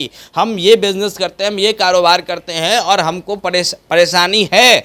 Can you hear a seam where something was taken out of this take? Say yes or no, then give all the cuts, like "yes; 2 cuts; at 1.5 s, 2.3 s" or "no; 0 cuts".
no; 0 cuts